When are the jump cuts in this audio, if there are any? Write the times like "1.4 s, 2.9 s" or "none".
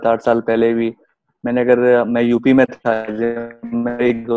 none